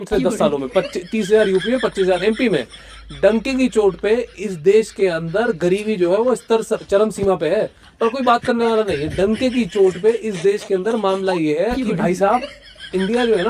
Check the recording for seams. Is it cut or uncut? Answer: uncut